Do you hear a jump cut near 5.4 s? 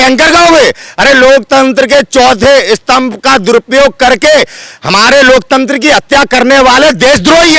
no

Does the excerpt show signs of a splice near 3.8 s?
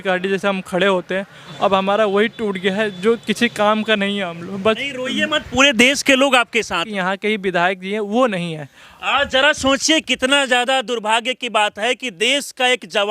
no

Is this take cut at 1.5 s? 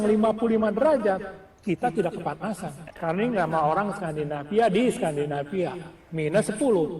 no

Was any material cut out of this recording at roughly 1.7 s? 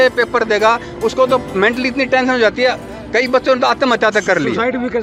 no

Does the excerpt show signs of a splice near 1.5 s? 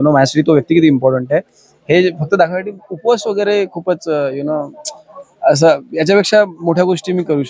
no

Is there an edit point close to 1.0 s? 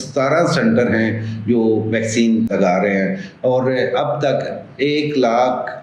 no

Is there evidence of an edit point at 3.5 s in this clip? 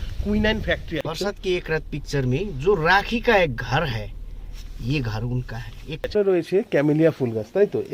no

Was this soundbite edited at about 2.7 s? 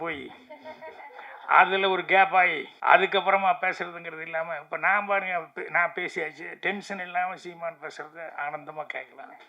yes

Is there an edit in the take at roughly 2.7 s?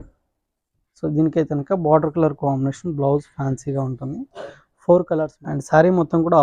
no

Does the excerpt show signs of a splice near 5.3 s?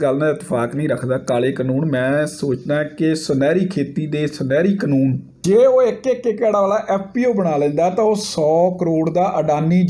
yes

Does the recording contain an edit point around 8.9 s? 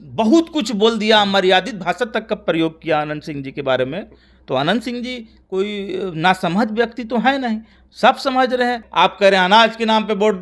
yes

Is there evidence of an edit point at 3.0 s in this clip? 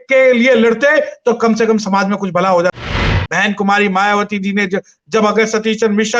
yes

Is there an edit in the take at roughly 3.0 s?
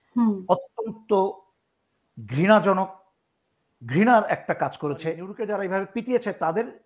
no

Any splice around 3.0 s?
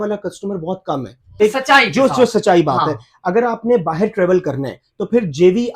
no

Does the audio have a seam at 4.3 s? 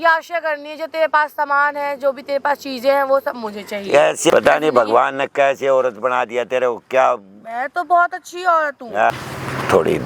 yes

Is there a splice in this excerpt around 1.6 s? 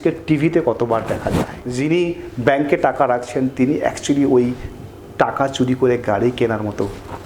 yes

